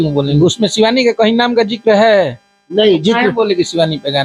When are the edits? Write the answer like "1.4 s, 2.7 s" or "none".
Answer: none